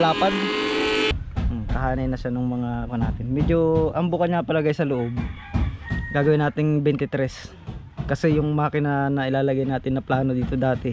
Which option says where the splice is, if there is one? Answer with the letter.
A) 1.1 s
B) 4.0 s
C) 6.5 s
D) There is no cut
A